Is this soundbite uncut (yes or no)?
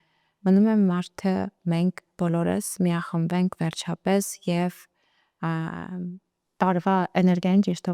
yes